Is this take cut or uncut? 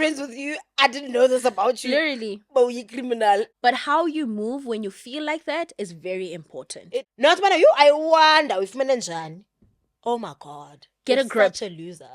cut